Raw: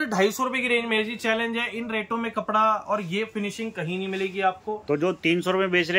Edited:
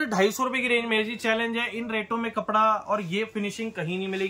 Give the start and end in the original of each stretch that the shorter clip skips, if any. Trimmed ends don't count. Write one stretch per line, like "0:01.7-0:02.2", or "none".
none